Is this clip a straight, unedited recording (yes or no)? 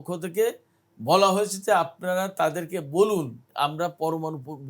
no